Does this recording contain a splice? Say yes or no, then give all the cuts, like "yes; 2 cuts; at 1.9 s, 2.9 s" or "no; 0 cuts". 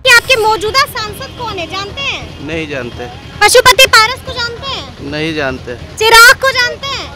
no; 0 cuts